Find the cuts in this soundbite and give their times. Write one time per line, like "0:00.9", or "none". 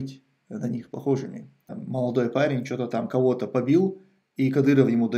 0:01.7